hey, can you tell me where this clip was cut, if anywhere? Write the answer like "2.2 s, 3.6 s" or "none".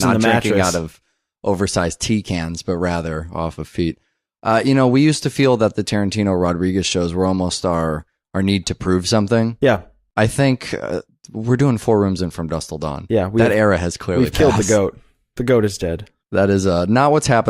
16.5 s